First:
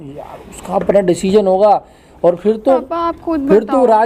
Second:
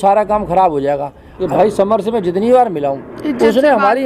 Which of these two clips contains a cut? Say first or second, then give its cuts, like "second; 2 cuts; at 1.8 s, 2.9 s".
second; 1 cut; at 1.4 s